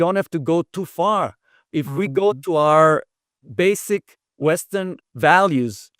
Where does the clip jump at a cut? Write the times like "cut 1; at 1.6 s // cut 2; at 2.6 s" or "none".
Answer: cut 1; at 4.2 s // cut 2; at 5.0 s